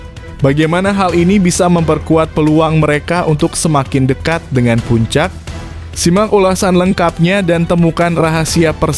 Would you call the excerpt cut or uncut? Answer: uncut